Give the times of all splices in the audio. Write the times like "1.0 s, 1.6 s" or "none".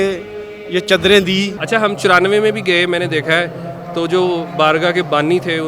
1.6 s